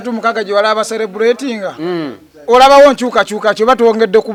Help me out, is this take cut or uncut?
uncut